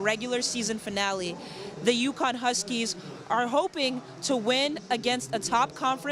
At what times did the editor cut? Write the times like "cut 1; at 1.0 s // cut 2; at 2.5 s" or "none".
cut 1; at 1.6 s